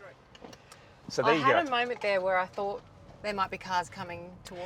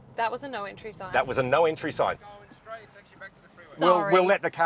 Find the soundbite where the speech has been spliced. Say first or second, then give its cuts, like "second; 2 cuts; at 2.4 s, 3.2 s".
second; 1 cut; at 2.2 s